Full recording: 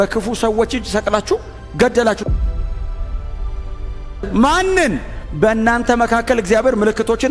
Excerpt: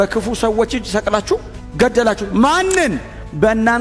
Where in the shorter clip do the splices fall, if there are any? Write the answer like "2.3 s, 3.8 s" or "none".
2.2 s